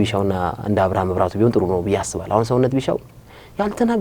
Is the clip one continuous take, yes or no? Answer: yes